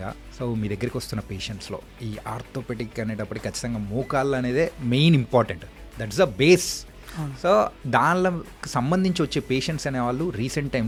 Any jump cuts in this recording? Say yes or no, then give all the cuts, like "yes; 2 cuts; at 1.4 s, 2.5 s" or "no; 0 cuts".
no; 0 cuts